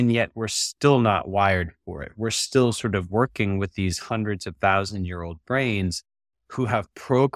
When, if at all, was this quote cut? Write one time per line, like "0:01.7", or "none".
none